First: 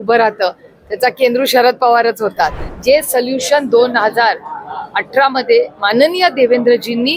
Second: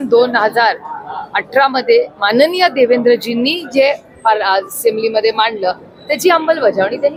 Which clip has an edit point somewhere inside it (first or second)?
first